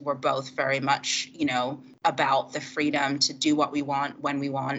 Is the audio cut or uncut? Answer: uncut